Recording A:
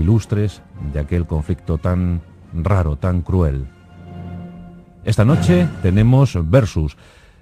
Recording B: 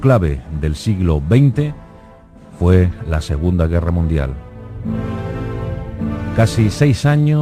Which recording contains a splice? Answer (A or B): B